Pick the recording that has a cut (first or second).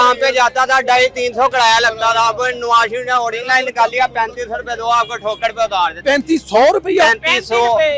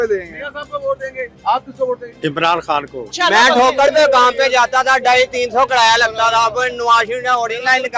second